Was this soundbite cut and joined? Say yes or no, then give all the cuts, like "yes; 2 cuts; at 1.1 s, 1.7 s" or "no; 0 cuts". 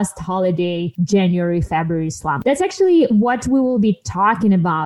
yes; 2 cuts; at 0.9 s, 2.3 s